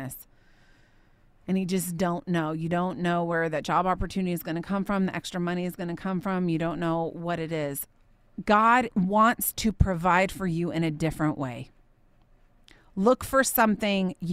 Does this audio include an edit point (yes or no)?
yes